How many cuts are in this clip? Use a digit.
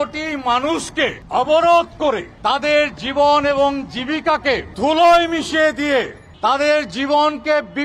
4